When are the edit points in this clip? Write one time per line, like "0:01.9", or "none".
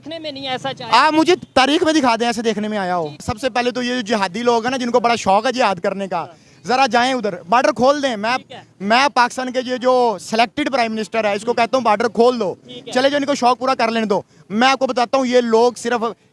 0:03.2

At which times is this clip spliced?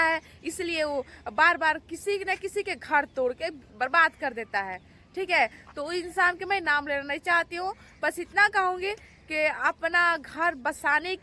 none

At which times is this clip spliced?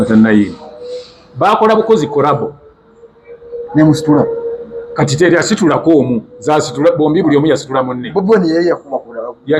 none

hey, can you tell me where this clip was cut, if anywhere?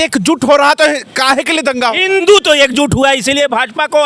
0:02.2

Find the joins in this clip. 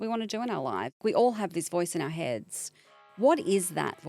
0:01.0
0:03.0

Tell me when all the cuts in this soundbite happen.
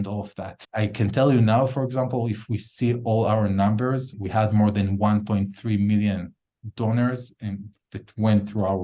none

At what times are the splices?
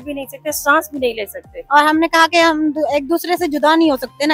0:01.6

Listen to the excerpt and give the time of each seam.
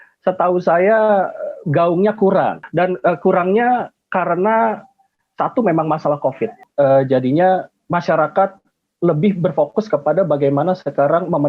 0:02.6
0:06.6
0:07.8

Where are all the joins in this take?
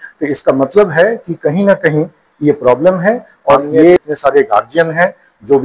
0:04.0

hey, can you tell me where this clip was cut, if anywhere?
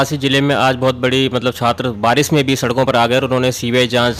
none

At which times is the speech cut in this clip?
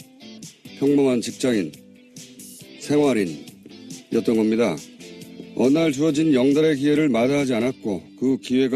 0:04.2

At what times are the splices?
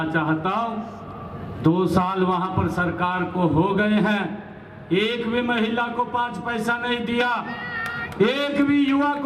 none

